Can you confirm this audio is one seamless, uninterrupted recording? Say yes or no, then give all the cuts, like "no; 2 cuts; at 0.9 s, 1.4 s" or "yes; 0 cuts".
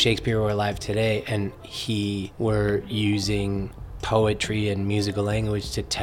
no; 1 cut; at 2.3 s